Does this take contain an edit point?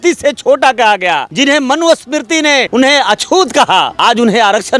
yes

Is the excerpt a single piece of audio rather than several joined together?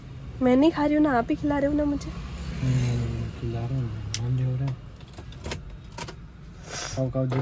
yes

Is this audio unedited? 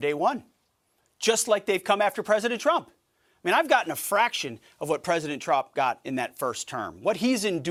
yes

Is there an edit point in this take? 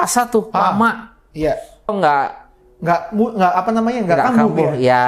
yes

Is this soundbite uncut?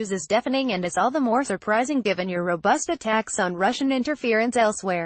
yes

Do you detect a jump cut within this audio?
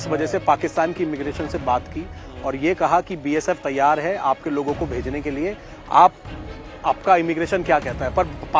no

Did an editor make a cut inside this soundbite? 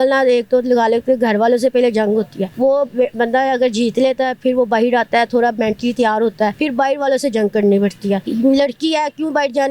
yes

